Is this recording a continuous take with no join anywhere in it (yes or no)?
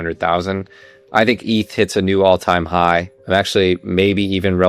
no